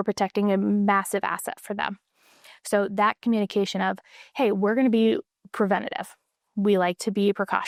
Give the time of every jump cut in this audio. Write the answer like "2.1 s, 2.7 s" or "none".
none